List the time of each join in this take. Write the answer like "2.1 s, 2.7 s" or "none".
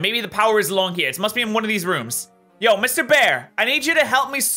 none